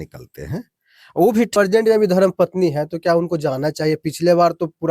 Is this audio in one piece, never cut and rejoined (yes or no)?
no